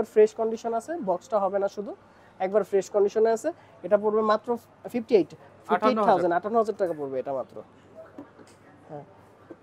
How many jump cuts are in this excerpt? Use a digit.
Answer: 0